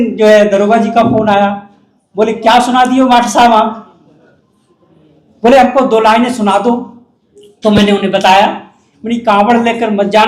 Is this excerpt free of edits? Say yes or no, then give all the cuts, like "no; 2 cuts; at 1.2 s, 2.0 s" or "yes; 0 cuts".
yes; 0 cuts